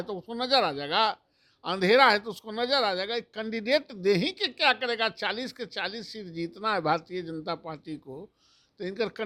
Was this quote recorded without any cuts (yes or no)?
yes